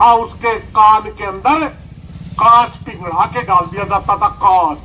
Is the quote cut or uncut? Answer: uncut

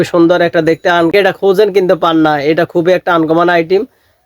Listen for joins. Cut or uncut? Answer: cut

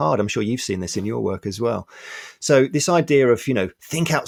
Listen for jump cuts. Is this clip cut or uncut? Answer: uncut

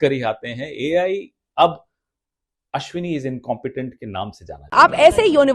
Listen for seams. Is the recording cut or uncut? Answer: cut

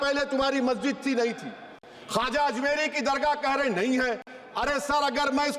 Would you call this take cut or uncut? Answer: uncut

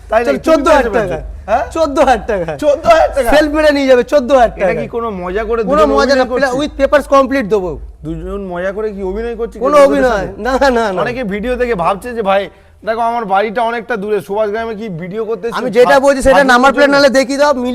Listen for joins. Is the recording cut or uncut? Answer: uncut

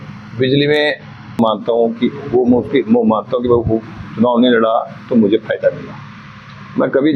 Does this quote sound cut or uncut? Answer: cut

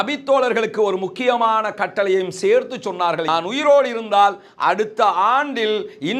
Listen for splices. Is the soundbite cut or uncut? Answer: cut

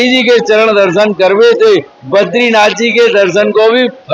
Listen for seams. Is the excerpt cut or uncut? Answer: uncut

